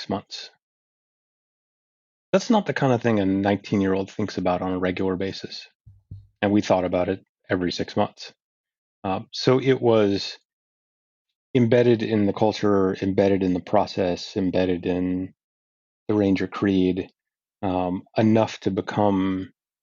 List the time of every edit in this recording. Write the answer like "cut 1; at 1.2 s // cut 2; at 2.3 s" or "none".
cut 1; at 10.8 s